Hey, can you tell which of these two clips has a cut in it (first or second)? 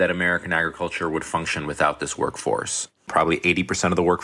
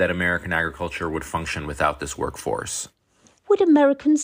first